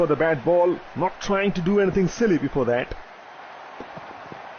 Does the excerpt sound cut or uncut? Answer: cut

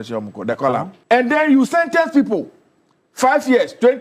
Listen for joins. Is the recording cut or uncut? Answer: cut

